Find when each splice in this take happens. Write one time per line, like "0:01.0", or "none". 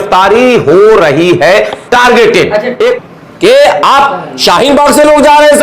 0:03.0